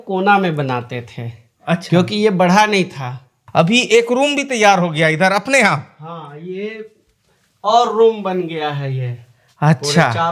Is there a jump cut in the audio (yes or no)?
yes